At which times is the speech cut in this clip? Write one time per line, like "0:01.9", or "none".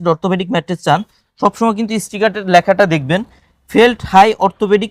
none